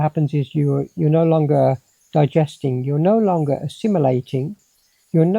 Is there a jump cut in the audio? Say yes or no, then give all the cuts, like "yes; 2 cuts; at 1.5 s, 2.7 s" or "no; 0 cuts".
no; 0 cuts